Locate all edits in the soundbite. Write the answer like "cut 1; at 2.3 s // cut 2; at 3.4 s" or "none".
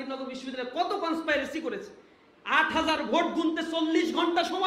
none